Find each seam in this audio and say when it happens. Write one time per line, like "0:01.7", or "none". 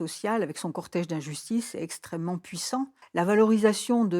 0:03.0